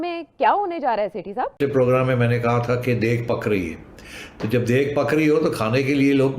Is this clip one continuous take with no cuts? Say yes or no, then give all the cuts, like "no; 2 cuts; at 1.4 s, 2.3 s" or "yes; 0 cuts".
no; 1 cut; at 1.6 s